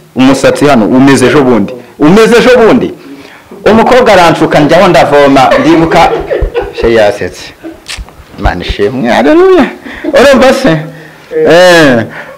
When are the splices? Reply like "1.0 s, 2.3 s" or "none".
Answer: none